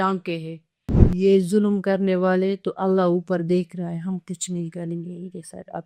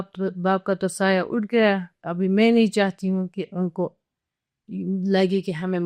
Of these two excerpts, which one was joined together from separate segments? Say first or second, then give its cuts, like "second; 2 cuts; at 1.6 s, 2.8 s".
first; 1 cut; at 1.0 s